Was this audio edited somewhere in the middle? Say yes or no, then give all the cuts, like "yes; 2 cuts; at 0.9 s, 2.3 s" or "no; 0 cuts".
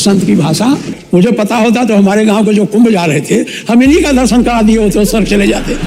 yes; 1 cut; at 0.9 s